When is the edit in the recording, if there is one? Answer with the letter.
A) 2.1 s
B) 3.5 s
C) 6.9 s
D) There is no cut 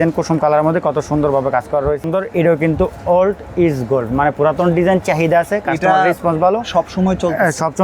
A